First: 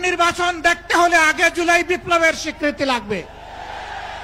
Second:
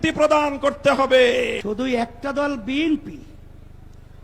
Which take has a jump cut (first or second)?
second